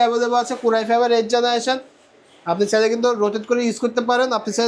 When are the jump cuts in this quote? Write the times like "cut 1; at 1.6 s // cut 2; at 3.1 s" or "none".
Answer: none